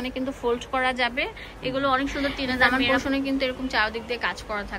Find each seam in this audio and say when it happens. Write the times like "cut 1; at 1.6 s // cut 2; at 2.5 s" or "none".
cut 1; at 2.5 s